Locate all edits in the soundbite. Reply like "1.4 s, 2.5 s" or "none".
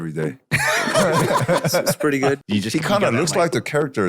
2.4 s